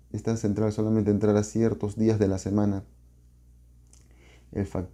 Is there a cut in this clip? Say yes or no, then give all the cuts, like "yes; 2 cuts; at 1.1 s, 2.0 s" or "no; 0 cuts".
no; 0 cuts